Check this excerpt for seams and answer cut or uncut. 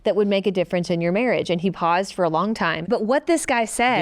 cut